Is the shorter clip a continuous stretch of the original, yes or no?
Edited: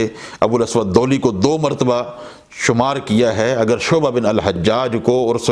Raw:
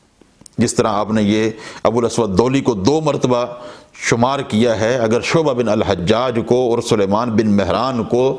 yes